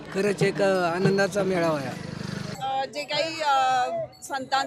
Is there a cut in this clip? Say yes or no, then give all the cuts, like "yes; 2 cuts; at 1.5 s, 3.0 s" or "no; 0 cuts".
yes; 1 cut; at 2.5 s